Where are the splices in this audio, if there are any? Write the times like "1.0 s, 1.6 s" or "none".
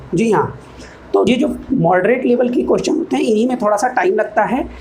1.3 s